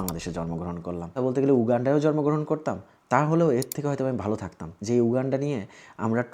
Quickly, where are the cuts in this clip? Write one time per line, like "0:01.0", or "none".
0:01.1
0:04.7